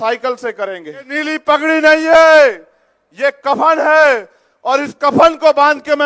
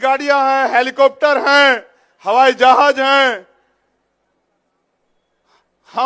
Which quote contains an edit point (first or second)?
first